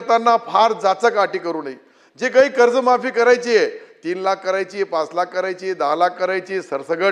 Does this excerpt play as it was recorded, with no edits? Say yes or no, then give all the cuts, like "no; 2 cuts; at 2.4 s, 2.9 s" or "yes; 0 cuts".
yes; 0 cuts